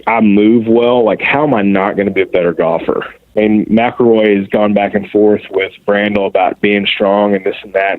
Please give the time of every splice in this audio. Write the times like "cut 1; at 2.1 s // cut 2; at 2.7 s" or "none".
cut 1; at 3.2 s